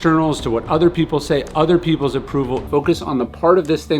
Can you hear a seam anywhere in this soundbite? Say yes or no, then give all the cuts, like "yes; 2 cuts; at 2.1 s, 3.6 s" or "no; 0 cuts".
yes; 1 cut; at 2.6 s